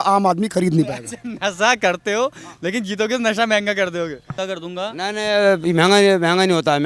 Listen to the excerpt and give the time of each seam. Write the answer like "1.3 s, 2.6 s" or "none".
4.3 s